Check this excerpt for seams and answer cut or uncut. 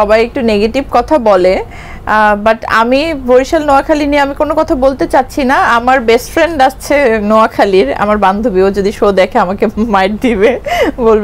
uncut